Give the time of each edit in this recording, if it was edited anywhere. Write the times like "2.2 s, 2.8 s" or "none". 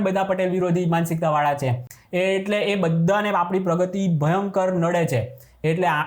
none